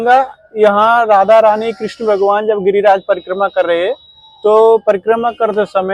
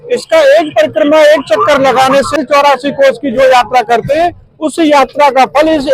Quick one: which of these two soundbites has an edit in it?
second; 1 cut; at 2.4 s

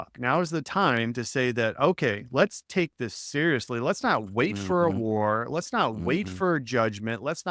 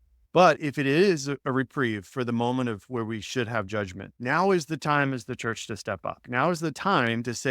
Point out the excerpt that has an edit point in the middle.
second; 1 cut; at 4.1 s

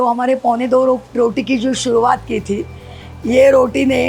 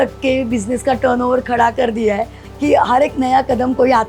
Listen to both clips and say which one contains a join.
second; 1 cut; at 2.4 s

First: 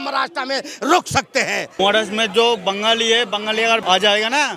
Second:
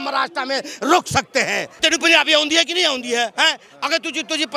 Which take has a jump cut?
first; 2 cuts; at 1.7 s, 3.8 s

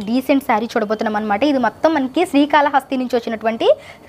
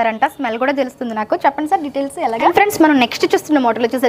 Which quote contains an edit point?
second; 1 cut; at 2.5 s

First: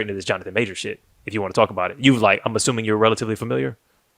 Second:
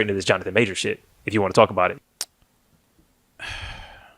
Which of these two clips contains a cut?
second; 1 cut; at 1.9 s

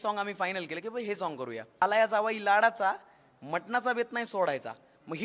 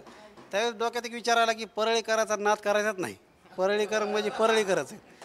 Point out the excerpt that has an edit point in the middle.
first; 1 cut; at 1.8 s

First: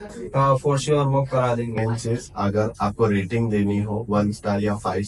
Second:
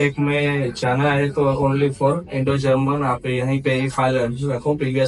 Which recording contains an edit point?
first; 1 cut; at 1.8 s

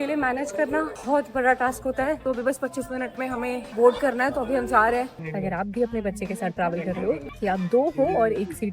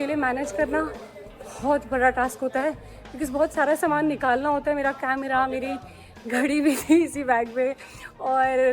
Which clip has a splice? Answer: first; 5 cuts; at 1.0 s, 2.2 s, 3.7 s, 5.2 s, 7.2 s

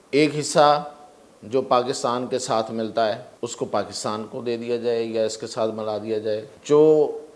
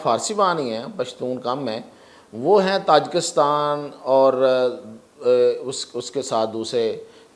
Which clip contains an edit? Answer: first; 2 cuts; at 3.3 s, 6.5 s

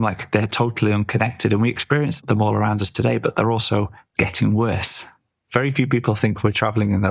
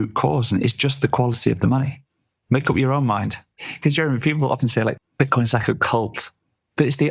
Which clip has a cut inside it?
second; 1 cut; at 2.2 s

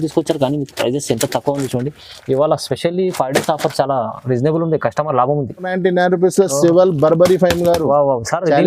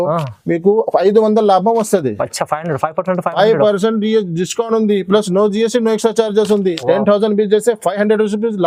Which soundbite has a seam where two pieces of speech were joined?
first; 1 cut; at 5.7 s

